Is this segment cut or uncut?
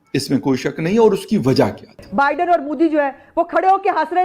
cut